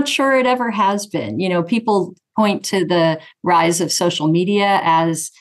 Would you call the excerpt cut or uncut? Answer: uncut